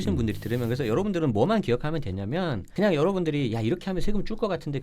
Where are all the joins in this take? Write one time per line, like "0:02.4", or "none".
0:02.6